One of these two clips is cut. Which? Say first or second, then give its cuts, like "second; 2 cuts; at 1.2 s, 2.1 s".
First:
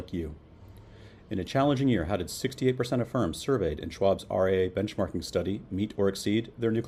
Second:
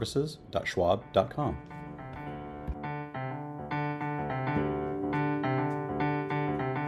second; 1 cut; at 1.7 s